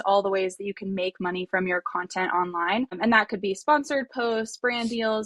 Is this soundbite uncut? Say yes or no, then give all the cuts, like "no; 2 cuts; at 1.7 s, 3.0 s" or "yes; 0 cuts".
no; 1 cut; at 3.0 s